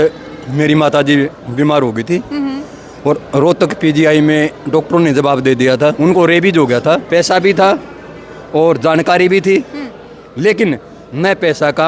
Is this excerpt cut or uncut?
cut